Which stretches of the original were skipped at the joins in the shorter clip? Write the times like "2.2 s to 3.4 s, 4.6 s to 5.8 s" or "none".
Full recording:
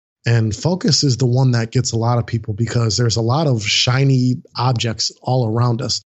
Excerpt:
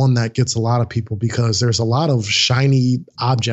none